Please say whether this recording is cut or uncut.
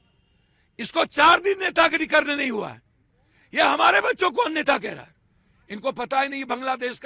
uncut